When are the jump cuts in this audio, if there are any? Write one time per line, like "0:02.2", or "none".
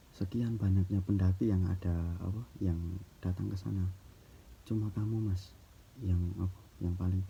none